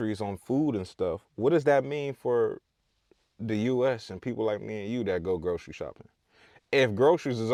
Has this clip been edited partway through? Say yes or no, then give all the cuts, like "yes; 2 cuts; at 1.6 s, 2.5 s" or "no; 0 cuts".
no; 0 cuts